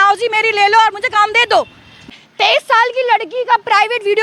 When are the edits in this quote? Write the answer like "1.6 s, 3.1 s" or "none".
2.1 s